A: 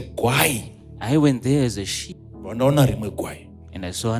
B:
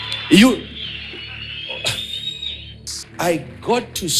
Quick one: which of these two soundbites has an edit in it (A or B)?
B